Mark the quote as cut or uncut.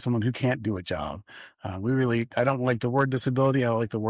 uncut